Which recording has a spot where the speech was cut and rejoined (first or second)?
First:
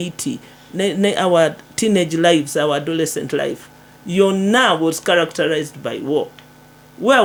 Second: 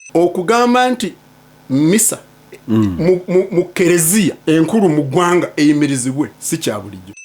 second